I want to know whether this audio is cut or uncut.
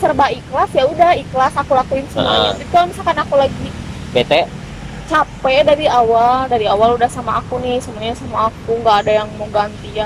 uncut